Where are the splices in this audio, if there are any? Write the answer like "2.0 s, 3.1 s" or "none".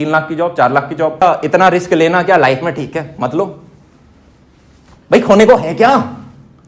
1.2 s